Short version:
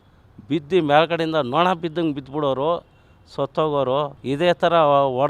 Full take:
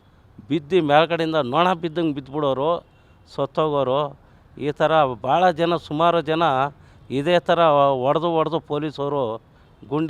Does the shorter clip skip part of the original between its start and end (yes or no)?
yes